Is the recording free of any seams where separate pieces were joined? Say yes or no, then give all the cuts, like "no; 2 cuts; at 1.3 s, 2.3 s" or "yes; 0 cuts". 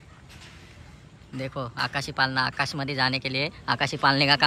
yes; 0 cuts